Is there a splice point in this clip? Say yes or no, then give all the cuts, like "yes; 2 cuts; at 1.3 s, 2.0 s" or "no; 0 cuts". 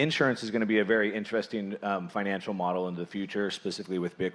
no; 0 cuts